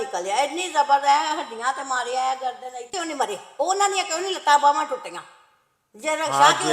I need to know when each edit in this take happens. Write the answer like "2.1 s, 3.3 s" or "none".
2.9 s

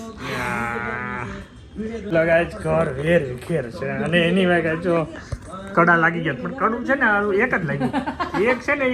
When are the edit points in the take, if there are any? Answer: 2.1 s

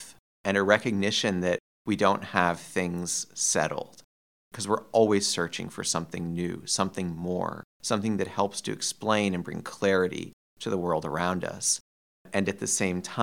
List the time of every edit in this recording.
11.9 s

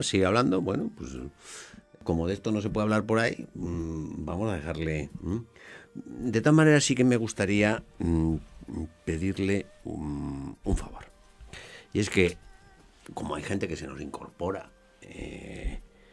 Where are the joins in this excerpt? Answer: 1.7 s

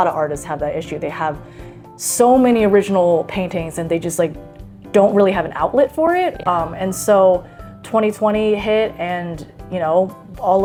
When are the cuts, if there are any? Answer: none

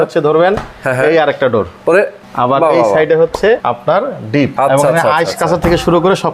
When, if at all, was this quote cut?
1.8 s, 3.6 s, 4.5 s

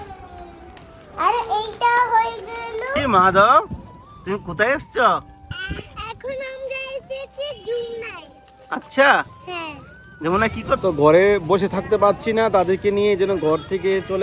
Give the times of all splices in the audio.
2.8 s, 10.8 s

